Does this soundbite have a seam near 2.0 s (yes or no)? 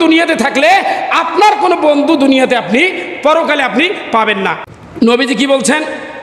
no